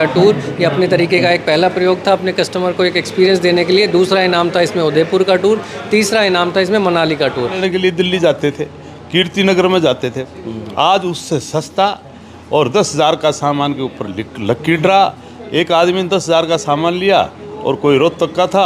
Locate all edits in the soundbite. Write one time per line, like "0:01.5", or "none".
0:07.5